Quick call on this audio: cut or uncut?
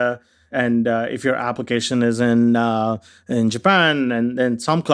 uncut